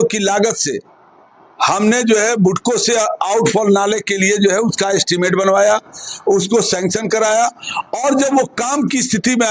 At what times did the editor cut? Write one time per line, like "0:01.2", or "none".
none